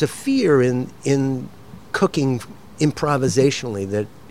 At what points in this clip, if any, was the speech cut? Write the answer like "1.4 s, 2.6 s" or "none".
none